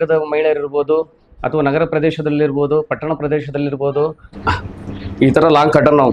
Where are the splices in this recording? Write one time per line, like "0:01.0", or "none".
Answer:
0:04.3

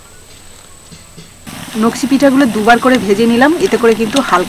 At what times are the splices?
0:01.4

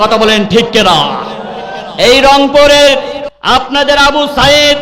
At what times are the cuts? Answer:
0:03.3

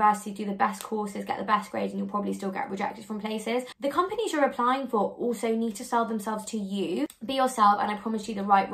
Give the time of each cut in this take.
0:03.7
0:07.1

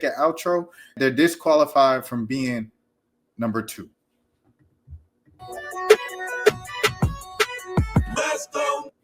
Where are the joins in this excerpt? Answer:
0:00.9

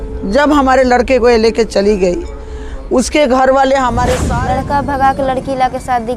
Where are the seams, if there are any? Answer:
0:04.3

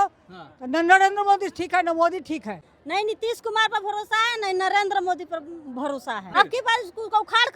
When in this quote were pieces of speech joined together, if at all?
0:02.7
0:06.3

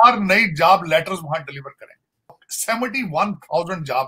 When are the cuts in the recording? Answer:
0:02.5

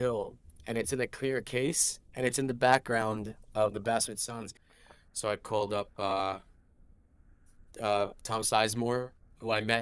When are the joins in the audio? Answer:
0:04.6

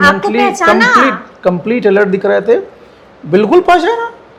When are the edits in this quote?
none

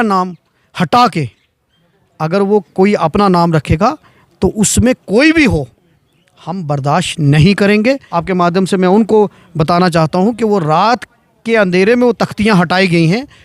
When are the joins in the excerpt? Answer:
0:08.1

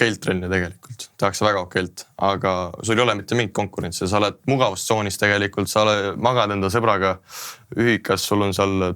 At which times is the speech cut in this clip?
none

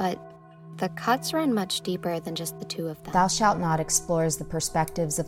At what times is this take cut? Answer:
0:03.0

